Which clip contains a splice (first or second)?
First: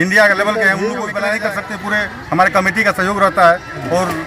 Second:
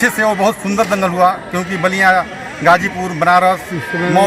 first